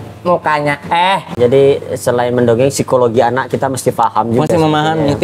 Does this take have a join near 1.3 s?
yes; 1 cut; at 1.3 s

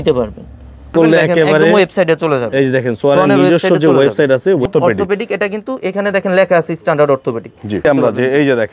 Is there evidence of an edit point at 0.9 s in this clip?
yes; 3 cuts; at 0.9 s, 4.7 s, 7.9 s

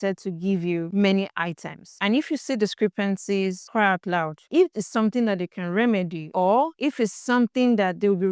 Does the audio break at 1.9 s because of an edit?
yes; 1 cut; at 1.9 s

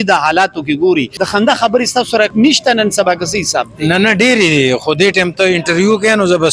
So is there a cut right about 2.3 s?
yes; 2 cuts; at 1.2 s, 2.3 s

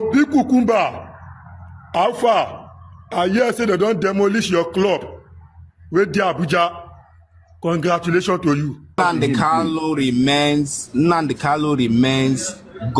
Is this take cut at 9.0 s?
yes; 1 cut; at 9.0 s

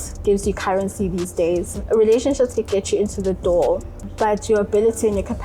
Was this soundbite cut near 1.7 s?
yes; 1 cut; at 1.7 s

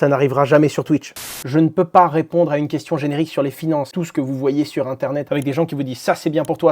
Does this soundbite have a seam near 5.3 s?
yes; 3 cuts; at 1.3 s, 3.9 s, 5.3 s

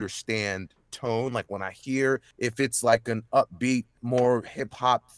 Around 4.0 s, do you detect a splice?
yes; 2 cuts; at 2.3 s, 4.0 s

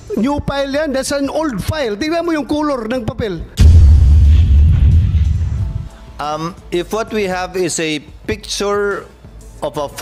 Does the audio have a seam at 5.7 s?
yes; 2 cuts; at 3.5 s, 5.7 s

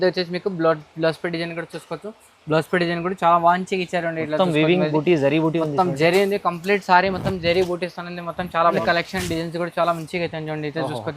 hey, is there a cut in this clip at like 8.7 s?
yes; 1 cut; at 8.7 s

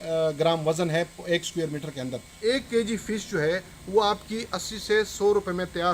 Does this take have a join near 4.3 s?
no; 1 cut; at 2.4 s

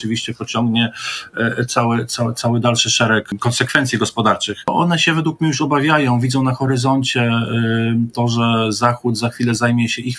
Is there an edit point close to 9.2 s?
no; 2 cuts; at 3.3 s, 4.7 s

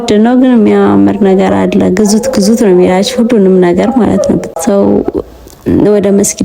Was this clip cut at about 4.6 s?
yes; 1 cut; at 4.6 s

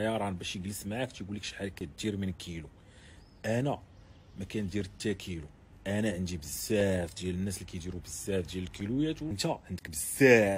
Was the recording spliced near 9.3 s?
yes; 1 cut; at 9.3 s

